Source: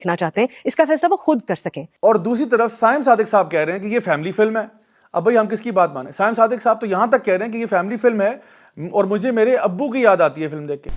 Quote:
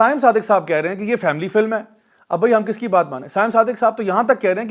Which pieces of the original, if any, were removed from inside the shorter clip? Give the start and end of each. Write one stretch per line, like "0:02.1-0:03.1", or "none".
none